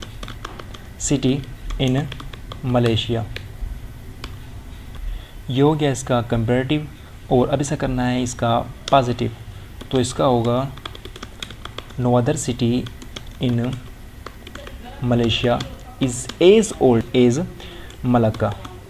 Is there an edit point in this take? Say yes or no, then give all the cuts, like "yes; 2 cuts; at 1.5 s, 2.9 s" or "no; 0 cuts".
yes; 1 cut; at 17.1 s